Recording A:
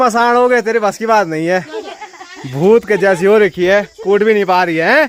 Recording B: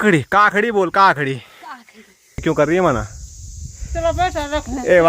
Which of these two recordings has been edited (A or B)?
B